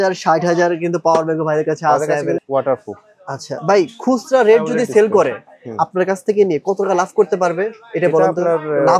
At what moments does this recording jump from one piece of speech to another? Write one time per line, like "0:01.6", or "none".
0:02.4